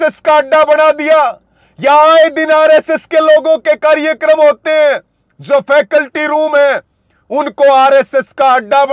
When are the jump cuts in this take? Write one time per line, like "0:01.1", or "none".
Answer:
none

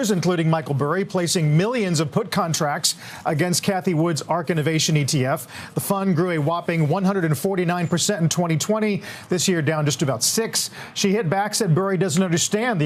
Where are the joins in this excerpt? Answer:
none

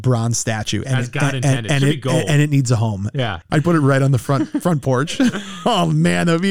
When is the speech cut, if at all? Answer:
0:03.3

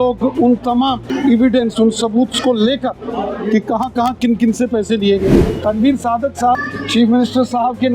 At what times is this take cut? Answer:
0:01.1
0:05.3
0:06.6

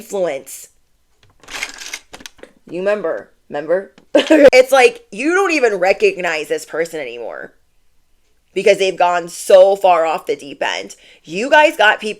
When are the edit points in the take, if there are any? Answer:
0:04.5

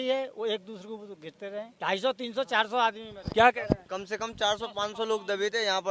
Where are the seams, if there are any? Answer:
0:01.7

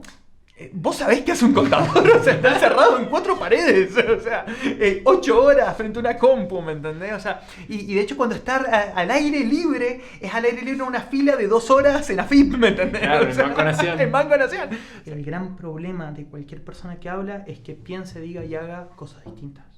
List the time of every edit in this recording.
0:14.9

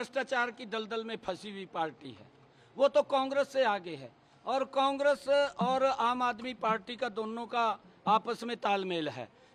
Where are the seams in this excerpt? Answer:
none

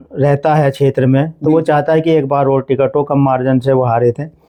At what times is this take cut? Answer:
none

